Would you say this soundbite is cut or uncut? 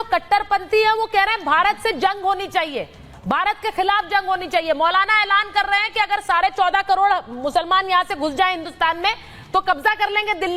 uncut